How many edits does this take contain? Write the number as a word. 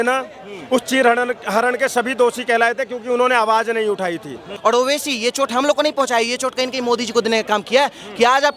one